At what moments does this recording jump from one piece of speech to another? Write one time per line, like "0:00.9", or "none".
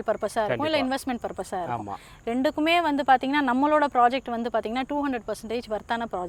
none

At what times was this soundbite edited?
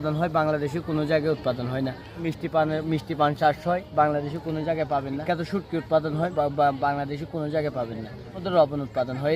0:02.2
0:05.2
0:06.3
0:08.4

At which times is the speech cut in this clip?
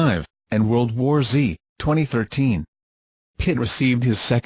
0:01.7

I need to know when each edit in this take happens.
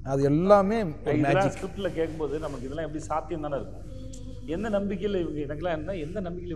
none

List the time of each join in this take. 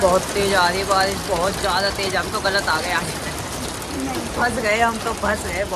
none

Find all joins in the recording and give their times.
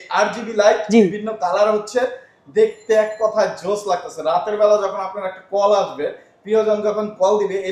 none

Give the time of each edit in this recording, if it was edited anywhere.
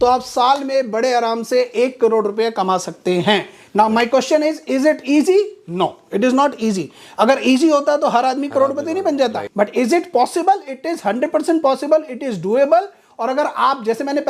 0:09.4

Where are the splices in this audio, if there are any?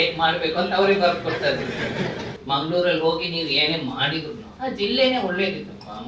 0:02.3
0:04.5

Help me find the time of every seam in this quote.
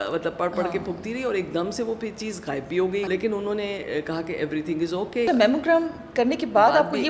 0:03.1
0:05.3

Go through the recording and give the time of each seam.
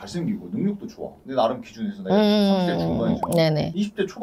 none

